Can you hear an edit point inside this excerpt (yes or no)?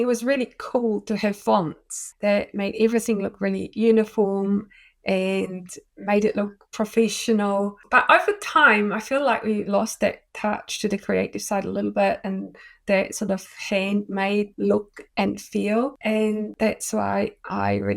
no